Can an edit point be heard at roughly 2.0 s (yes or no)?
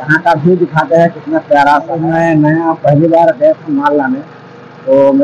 yes